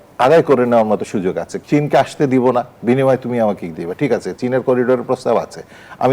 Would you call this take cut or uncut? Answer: cut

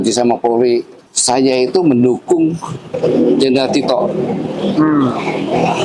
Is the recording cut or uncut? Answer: uncut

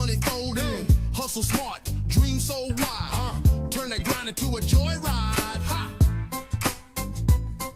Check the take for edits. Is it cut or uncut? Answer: uncut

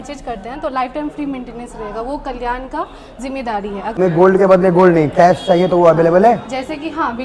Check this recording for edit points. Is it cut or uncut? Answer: cut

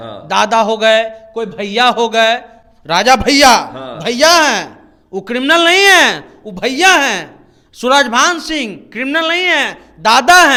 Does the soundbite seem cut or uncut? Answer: uncut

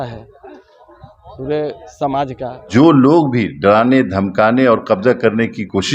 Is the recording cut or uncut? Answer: cut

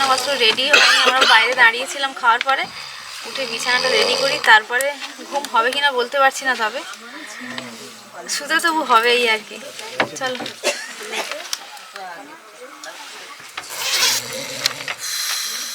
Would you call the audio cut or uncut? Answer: uncut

